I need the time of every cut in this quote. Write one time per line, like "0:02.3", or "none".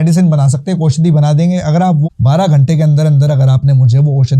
0:02.0